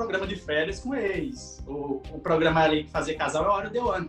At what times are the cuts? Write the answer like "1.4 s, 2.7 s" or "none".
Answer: none